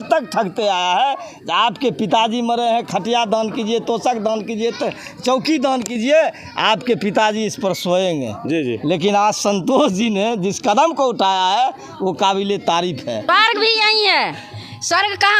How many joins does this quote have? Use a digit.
1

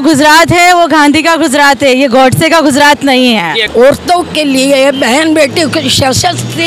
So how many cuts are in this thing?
1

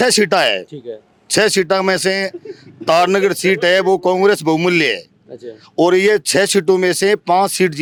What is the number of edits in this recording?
0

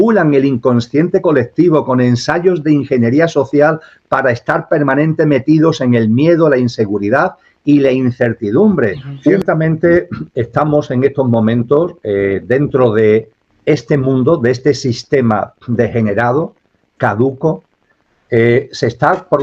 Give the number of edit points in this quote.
1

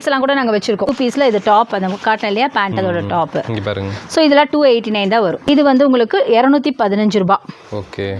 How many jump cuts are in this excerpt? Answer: 2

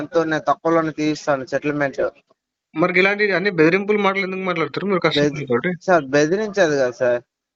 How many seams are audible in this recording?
0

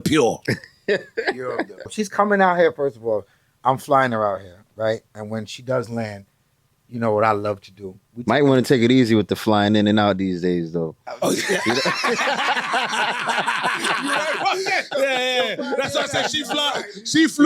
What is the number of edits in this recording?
1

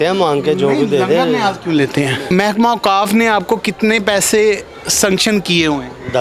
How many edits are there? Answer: 1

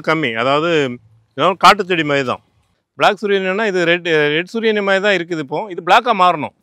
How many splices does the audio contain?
1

